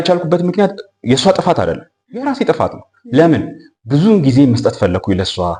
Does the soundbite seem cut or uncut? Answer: uncut